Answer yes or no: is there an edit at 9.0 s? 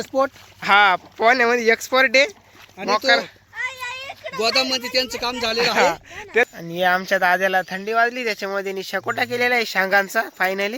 no